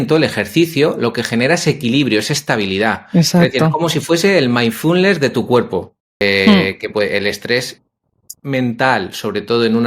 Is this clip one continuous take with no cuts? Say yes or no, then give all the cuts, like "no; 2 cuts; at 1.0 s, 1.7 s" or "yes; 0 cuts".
no; 1 cut; at 6.2 s